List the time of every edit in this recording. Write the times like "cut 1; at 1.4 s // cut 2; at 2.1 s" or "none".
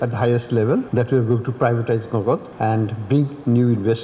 cut 1; at 0.9 s // cut 2; at 2.5 s